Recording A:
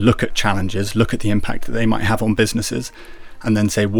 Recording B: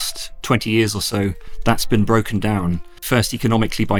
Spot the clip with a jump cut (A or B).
B